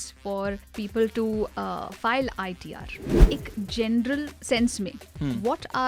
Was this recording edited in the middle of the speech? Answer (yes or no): yes